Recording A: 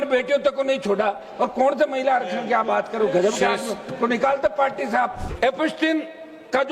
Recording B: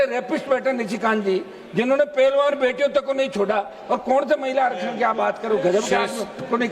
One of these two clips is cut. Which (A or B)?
A